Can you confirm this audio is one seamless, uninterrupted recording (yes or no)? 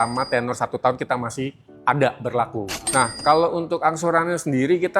no